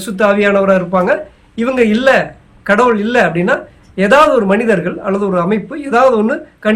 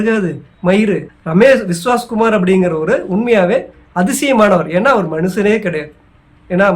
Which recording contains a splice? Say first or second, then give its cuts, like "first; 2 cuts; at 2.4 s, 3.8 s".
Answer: second; 1 cut; at 1.1 s